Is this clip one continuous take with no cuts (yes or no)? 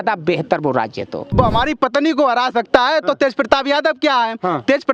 no